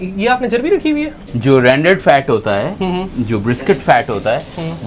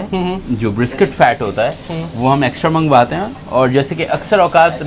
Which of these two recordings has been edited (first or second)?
first